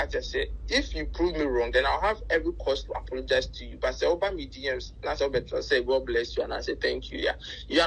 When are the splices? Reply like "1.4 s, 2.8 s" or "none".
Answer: none